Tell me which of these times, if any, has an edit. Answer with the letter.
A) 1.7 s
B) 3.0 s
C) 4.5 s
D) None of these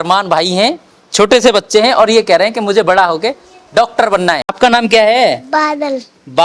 C